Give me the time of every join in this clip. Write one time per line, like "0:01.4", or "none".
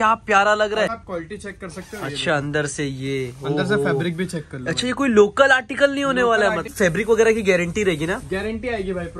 0:00.9
0:06.7